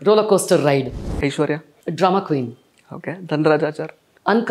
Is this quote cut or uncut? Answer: cut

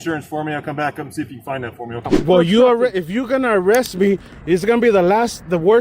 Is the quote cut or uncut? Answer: cut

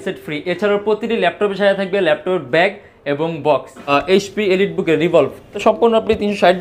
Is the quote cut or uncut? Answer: cut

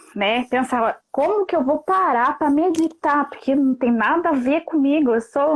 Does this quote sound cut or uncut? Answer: uncut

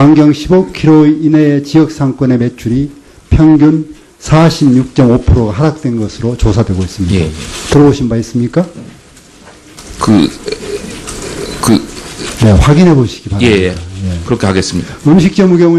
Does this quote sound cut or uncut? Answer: cut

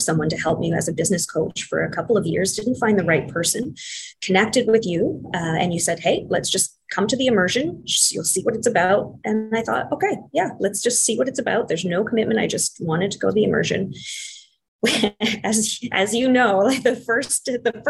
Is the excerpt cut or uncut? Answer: uncut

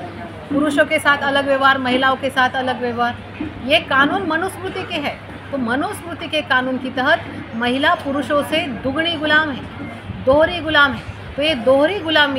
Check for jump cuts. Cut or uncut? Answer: uncut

